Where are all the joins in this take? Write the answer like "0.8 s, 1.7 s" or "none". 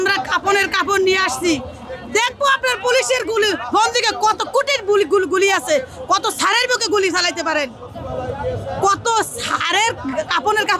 none